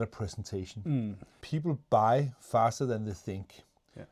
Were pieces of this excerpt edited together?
yes; 1 cut; at 1.3 s

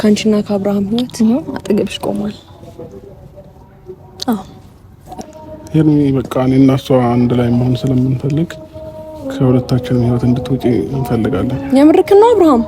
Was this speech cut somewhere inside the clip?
yes; 1 cut; at 5.2 s

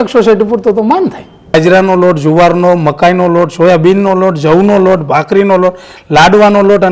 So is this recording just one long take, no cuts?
no; 1 cut; at 1.5 s

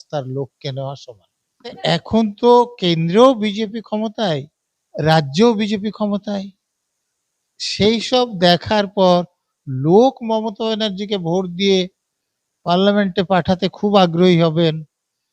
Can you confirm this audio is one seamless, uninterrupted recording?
no; 1 cut; at 1.8 s

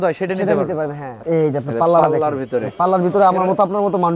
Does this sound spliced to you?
yes; 1 cut; at 1.1 s

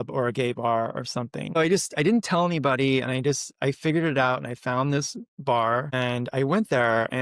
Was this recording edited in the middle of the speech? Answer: yes; 2 cuts; at 1.6 s, 5.9 s

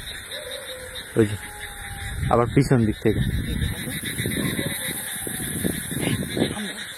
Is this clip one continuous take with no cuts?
yes; 0 cuts

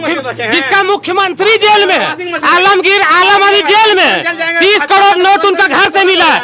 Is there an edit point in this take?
no; 0 cuts

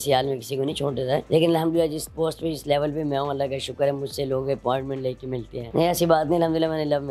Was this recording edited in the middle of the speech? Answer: yes; 2 cuts; at 1.2 s, 6.0 s

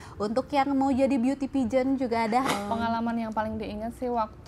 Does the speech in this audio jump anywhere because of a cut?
yes; 1 cut; at 2.4 s

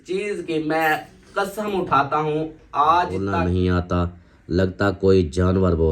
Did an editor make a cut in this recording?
yes; 1 cut; at 3.3 s

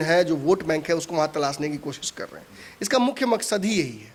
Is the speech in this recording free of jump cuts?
yes; 0 cuts

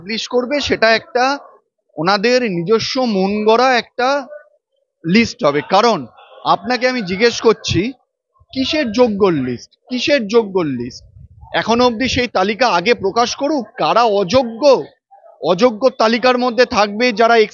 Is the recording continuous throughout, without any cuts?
yes; 0 cuts

